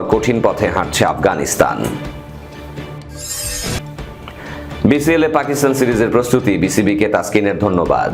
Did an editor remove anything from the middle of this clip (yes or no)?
no